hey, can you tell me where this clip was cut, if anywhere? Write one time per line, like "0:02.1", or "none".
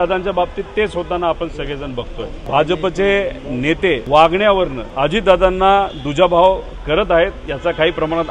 0:02.4
0:04.0
0:04.8